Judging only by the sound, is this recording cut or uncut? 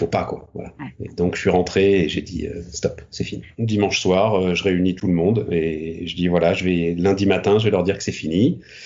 cut